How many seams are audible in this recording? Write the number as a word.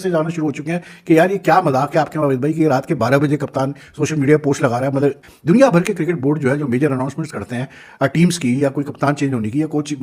one